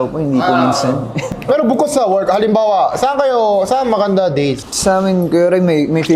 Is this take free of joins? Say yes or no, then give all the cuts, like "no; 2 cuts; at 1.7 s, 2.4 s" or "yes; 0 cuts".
yes; 0 cuts